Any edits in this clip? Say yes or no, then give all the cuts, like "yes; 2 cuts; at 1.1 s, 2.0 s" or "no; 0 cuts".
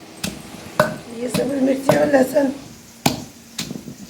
yes; 1 cut; at 2.8 s